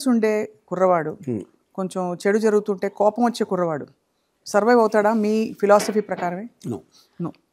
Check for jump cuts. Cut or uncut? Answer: uncut